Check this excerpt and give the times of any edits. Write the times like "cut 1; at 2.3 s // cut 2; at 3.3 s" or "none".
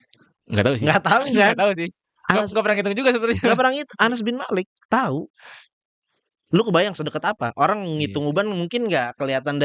none